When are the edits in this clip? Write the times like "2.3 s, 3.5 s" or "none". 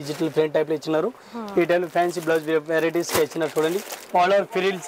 3.9 s